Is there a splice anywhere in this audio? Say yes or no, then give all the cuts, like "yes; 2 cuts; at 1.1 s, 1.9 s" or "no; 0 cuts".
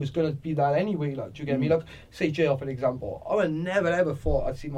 no; 0 cuts